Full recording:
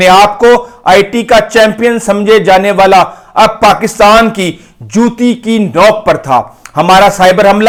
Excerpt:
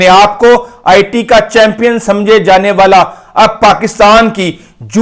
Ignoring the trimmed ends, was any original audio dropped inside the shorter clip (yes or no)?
no